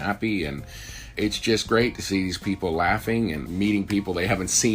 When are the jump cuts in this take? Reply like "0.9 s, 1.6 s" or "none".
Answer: 1.1 s, 3.4 s